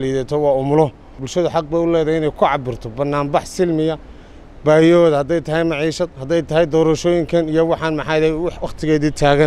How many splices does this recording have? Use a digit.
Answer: 1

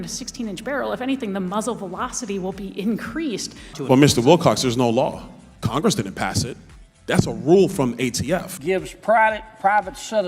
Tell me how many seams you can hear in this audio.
2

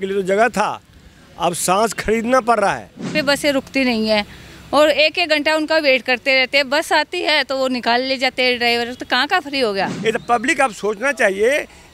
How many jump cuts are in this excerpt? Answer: 2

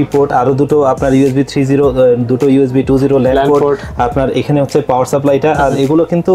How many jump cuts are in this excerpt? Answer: 0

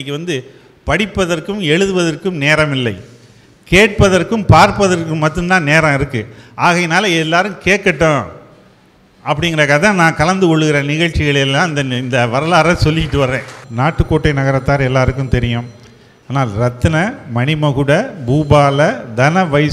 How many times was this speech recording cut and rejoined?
1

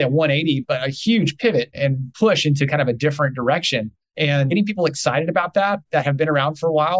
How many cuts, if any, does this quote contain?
1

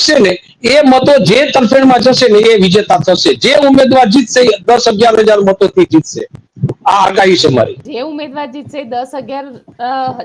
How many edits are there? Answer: 1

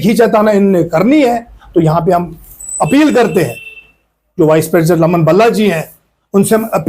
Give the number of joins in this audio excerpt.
0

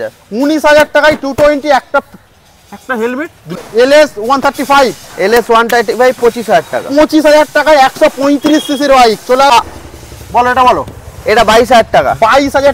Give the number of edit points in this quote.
2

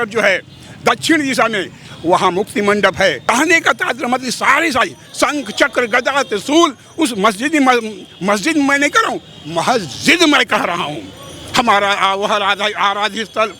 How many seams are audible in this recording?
1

